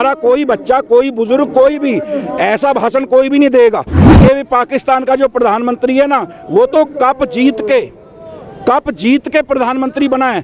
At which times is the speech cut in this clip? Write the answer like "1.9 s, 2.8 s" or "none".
4.0 s